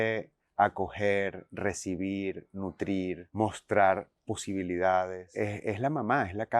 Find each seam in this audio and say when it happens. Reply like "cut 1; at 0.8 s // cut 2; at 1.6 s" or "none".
cut 1; at 3.3 s // cut 2; at 5.2 s